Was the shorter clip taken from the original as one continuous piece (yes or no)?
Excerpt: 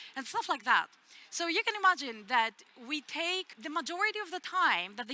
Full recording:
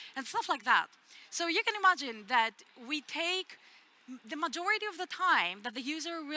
no